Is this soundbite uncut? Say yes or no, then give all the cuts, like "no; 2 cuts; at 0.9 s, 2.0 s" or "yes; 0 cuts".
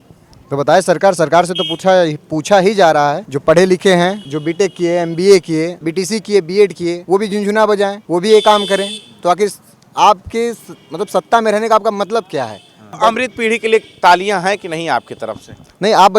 no; 6 cuts; at 3.3 s, 4.3 s, 5.8 s, 7.0 s, 8.0 s, 13.0 s